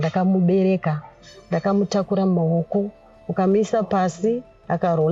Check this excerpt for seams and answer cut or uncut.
uncut